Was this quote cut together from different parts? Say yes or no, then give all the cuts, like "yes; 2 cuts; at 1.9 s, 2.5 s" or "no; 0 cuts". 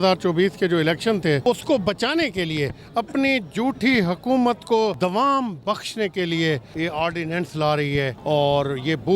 yes; 4 cuts; at 1.4 s, 5.0 s, 6.7 s, 8.2 s